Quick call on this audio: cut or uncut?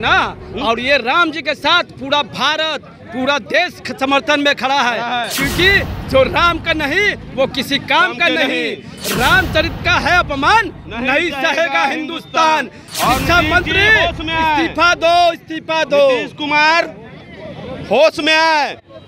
uncut